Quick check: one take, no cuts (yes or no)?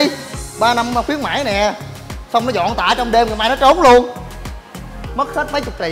yes